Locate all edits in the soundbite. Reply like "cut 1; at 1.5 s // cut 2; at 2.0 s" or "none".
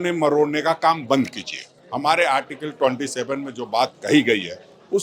none